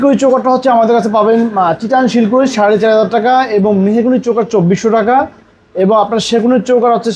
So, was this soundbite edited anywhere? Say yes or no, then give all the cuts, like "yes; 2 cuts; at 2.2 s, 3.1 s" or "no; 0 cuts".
no; 0 cuts